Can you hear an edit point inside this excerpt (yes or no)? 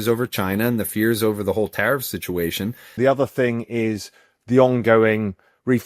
yes